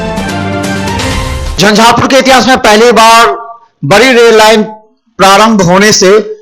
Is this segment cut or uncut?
uncut